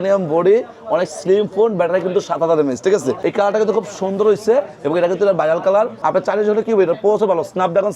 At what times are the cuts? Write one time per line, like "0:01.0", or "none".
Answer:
0:03.2
0:06.0